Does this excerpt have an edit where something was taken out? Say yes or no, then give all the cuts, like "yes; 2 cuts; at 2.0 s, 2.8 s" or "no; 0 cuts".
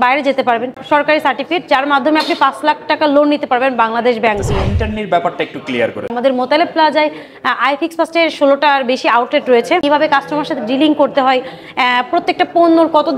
yes; 4 cuts; at 0.8 s, 4.5 s, 6.1 s, 9.8 s